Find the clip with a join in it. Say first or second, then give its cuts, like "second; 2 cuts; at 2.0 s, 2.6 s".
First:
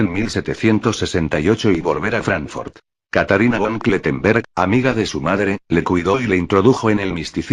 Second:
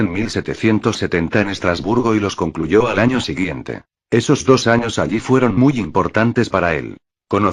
first; 1 cut; at 0.9 s